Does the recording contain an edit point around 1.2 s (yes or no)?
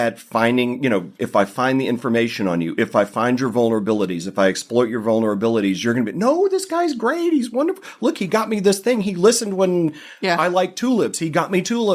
yes